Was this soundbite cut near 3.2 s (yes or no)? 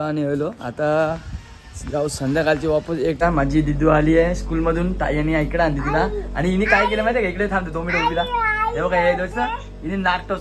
yes